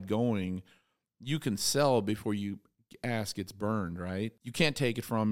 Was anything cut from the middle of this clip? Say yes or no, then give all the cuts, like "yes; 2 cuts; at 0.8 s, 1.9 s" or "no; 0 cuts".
yes; 1 cut; at 4.4 s